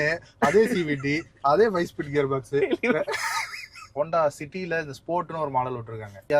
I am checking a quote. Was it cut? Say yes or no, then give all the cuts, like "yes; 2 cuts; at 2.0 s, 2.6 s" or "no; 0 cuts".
yes; 1 cut; at 3.9 s